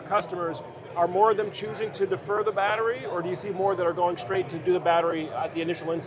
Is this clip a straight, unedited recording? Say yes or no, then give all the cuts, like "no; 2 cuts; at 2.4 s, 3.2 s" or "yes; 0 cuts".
yes; 0 cuts